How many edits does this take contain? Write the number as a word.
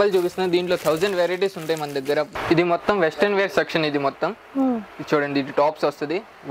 one